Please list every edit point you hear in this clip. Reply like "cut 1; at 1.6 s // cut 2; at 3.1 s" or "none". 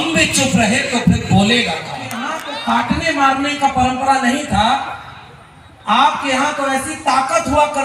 cut 1; at 2.3 s